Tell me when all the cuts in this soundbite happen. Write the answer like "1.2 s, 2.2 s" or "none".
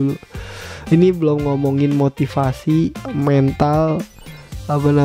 none